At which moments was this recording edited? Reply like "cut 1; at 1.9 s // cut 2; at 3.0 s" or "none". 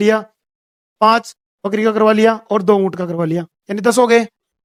none

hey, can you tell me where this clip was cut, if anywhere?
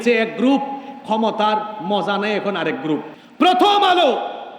cut 1; at 3.2 s

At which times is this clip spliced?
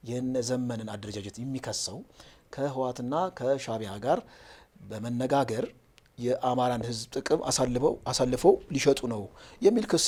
none

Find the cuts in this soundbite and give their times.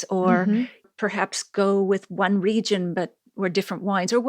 none

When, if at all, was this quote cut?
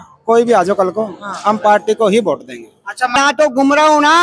cut 1; at 3.2 s

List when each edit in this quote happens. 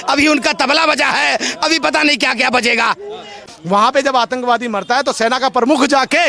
cut 1; at 3.4 s

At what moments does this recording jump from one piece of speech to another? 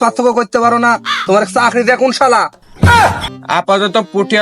cut 1; at 3.3 s

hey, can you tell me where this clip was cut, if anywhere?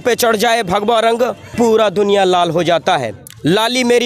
cut 1; at 1.4 s

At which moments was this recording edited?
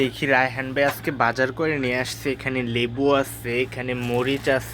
none

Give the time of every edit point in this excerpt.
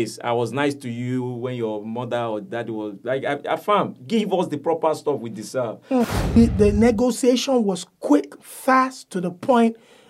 cut 1; at 6.1 s

